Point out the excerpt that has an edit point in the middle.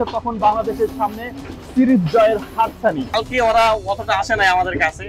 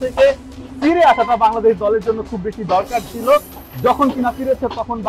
first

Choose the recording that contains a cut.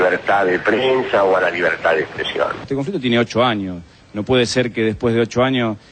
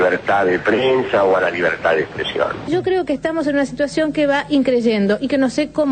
first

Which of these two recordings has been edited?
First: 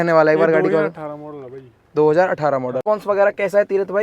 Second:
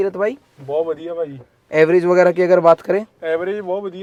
first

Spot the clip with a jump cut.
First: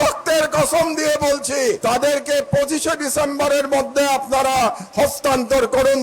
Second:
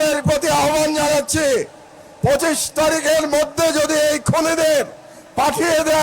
first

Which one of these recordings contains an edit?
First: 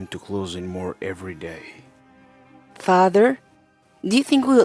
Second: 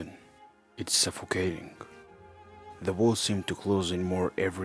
first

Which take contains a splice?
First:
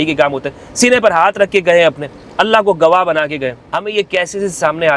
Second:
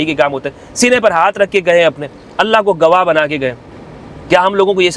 first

